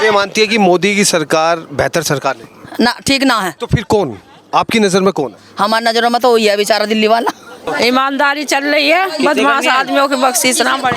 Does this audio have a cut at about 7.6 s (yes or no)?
yes